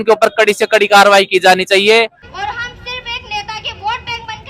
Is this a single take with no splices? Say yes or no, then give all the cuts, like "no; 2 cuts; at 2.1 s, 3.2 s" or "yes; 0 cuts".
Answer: no; 1 cut; at 2.2 s